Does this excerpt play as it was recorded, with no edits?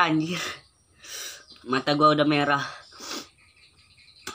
yes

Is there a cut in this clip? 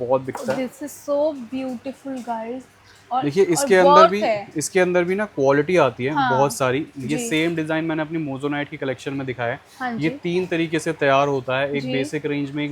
no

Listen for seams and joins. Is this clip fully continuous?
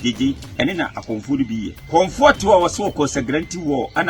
no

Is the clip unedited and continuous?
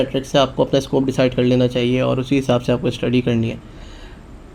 yes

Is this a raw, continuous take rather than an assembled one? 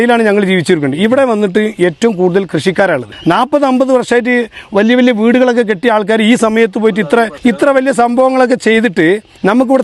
no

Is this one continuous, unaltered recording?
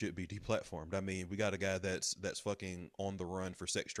yes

